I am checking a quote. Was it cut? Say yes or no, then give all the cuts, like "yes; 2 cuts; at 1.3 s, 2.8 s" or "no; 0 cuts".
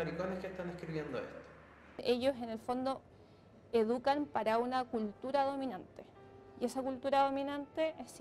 yes; 1 cut; at 2.0 s